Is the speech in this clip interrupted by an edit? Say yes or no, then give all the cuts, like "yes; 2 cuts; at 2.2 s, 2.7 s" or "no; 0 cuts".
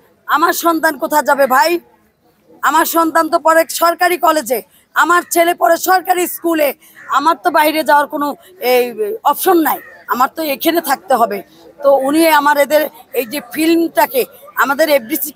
no; 0 cuts